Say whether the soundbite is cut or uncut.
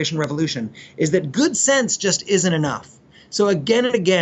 uncut